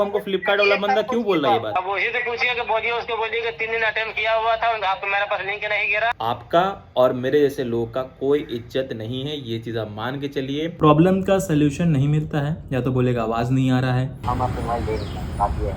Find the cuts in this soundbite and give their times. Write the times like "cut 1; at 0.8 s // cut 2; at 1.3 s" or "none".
cut 1; at 6.1 s // cut 2; at 10.8 s // cut 3; at 14.2 s